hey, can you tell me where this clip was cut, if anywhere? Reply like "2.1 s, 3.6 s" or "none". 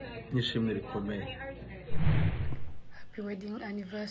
1.9 s, 2.5 s